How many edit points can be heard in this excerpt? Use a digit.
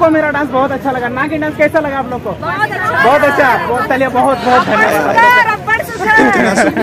0